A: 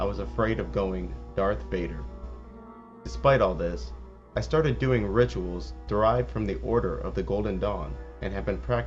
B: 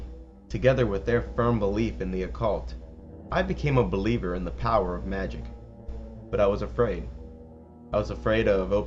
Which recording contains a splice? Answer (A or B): B